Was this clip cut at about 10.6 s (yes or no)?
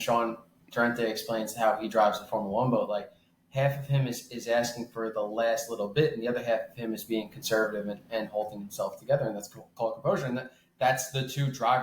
no